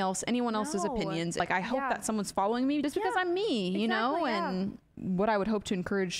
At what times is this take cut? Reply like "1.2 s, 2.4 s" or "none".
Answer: 1.4 s, 2.8 s, 4.9 s